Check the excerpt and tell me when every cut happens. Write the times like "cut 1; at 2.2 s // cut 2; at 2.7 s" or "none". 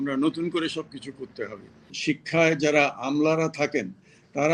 cut 1; at 1.9 s